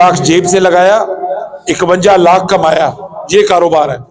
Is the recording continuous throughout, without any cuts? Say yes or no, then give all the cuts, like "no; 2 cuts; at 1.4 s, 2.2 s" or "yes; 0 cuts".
yes; 0 cuts